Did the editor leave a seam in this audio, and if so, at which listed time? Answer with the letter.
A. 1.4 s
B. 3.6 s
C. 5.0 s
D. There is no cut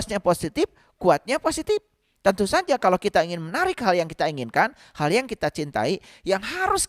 D